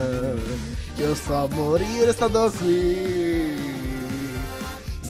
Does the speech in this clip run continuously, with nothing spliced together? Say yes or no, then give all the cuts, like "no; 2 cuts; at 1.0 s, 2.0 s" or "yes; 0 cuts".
yes; 0 cuts